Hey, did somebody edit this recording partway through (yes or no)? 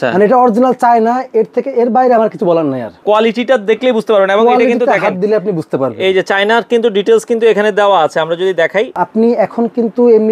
yes